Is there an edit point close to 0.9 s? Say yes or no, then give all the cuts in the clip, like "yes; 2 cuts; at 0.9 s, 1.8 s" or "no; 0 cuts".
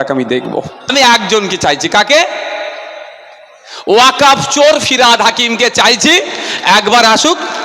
yes; 1 cut; at 0.9 s